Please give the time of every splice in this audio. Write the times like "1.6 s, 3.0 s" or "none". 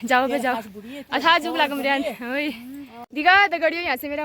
2.9 s